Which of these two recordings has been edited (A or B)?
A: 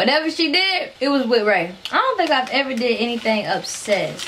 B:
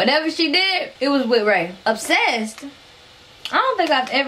A